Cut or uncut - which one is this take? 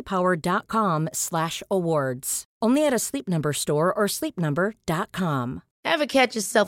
cut